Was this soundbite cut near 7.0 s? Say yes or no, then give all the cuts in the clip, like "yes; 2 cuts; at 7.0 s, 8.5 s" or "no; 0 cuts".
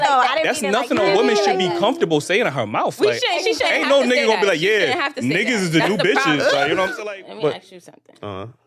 yes; 1 cut; at 7.0 s